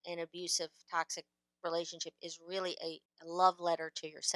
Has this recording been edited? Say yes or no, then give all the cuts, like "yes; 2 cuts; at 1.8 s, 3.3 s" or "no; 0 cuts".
yes; 1 cut; at 3.1 s